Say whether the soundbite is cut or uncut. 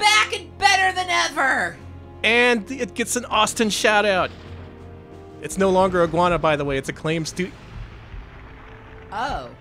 uncut